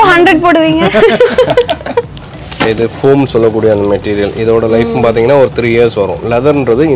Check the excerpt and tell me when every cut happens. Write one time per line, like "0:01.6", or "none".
0:02.4